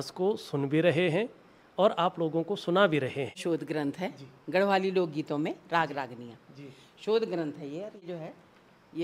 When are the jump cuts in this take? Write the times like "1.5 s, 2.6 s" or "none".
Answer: 3.4 s, 8.0 s